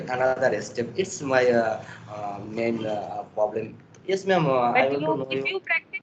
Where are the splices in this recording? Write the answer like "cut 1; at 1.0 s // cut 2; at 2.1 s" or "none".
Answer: none